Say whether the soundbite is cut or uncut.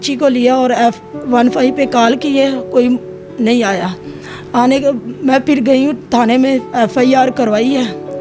uncut